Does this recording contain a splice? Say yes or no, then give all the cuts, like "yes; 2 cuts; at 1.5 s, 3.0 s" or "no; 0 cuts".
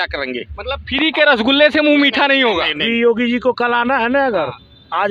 yes; 1 cut; at 2.8 s